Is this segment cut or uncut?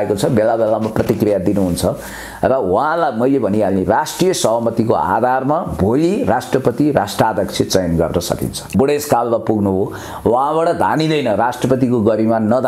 cut